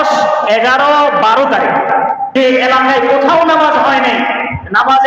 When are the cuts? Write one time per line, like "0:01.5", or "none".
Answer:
0:02.3